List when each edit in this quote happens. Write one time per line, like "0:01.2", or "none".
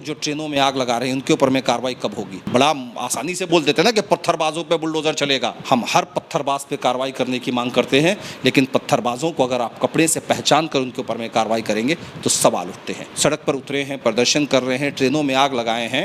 0:02.3
0:05.5
0:13.1